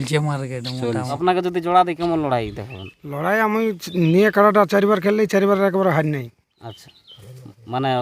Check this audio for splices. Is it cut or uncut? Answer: cut